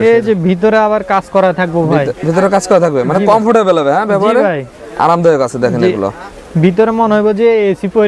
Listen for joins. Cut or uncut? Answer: uncut